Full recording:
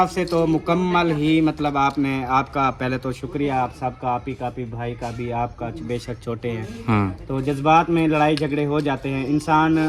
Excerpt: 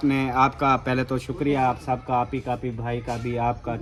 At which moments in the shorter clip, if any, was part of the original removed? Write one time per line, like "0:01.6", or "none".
none